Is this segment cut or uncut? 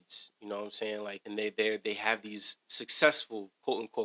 cut